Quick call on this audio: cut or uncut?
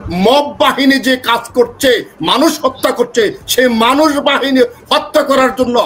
uncut